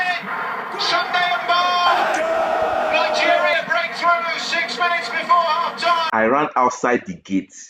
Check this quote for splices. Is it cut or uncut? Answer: uncut